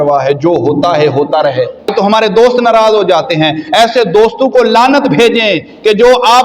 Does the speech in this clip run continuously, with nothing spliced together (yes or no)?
no